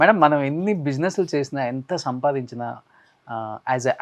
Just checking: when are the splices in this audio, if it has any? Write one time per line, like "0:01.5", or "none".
none